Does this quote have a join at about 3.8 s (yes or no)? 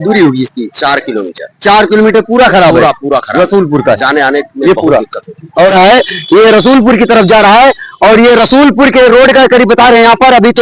no